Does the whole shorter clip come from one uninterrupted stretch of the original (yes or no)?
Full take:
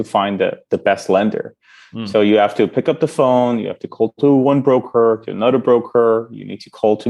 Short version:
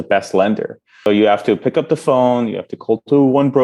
no